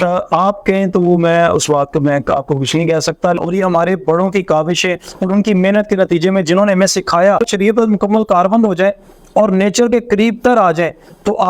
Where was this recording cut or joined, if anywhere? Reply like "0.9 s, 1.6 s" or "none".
3.4 s, 7.4 s